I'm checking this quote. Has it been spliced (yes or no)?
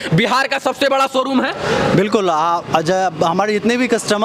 no